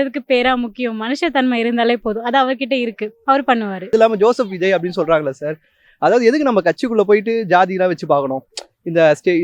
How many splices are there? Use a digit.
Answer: 1